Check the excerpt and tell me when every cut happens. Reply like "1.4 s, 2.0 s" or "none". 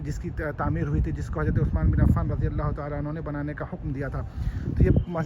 none